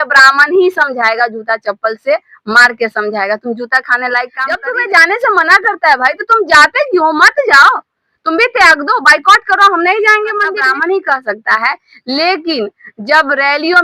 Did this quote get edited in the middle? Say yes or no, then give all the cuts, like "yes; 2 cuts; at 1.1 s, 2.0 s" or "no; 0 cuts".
yes; 2 cuts; at 4.5 s, 10.6 s